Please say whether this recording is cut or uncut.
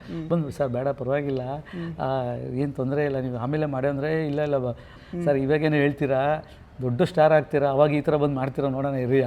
cut